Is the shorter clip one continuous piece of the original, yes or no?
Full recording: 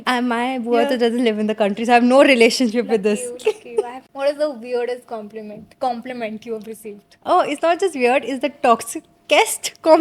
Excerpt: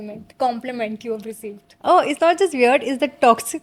yes